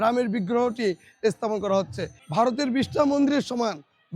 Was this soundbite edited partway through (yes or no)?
no